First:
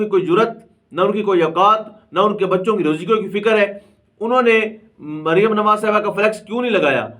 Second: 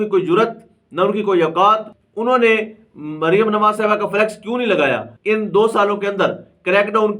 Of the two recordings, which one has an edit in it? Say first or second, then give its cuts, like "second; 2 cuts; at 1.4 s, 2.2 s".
second; 2 cuts; at 1.9 s, 5.1 s